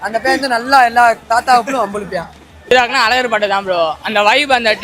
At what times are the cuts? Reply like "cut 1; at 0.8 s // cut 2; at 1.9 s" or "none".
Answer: cut 1; at 2.7 s

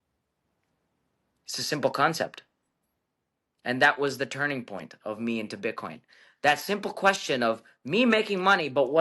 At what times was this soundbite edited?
none

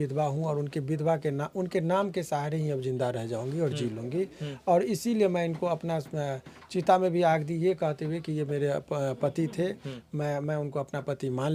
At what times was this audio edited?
none

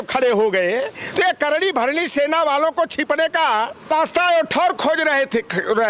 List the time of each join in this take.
cut 1; at 3.9 s

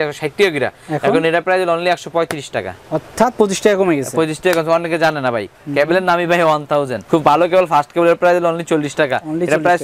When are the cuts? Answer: cut 1; at 5.6 s

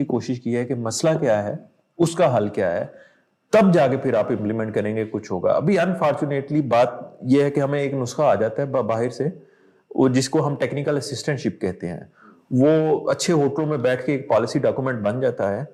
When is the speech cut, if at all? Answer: none

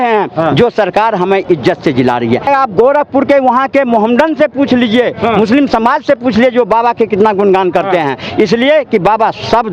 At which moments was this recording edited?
cut 1; at 2.5 s

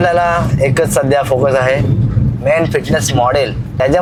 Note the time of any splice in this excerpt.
none

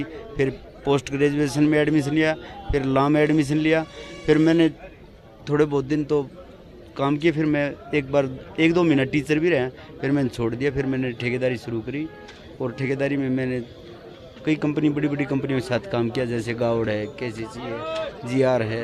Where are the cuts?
none

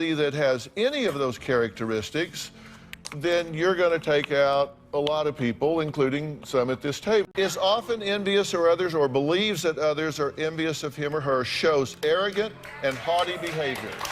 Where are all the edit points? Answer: cut 1; at 7.3 s

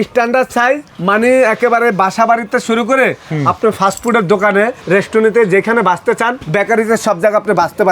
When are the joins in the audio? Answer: cut 1; at 4.8 s // cut 2; at 6.4 s

